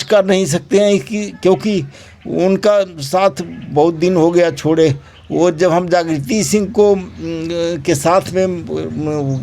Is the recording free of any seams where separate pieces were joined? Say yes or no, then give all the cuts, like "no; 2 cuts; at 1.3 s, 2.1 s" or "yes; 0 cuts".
yes; 0 cuts